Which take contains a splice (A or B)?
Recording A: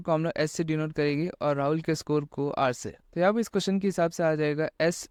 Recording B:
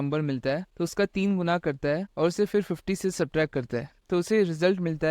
B